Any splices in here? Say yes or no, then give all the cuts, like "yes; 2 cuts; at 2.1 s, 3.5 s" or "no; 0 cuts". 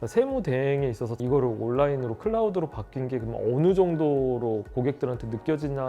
yes; 1 cut; at 1.2 s